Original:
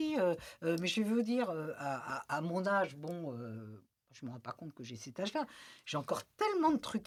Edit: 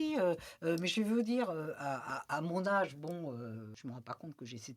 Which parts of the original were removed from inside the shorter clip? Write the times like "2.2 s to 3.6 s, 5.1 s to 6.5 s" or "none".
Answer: 3.7 s to 4.1 s